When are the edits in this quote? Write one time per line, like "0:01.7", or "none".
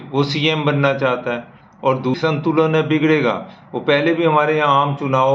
0:02.2